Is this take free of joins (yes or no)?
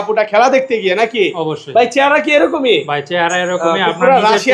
yes